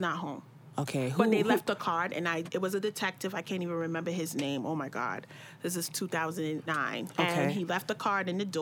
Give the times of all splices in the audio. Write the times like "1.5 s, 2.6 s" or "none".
1.8 s